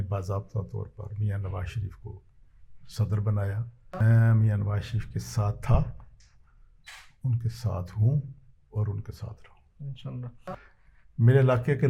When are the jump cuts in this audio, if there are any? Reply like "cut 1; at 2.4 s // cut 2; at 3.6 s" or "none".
cut 1; at 4.0 s // cut 2; at 10.4 s